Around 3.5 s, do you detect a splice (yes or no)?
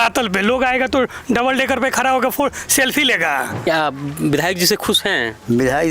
yes